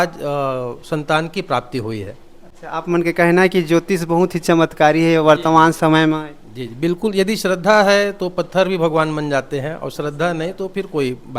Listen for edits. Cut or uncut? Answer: uncut